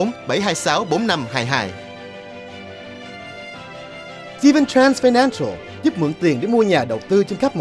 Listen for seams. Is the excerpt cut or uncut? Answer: uncut